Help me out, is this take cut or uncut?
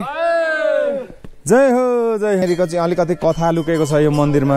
cut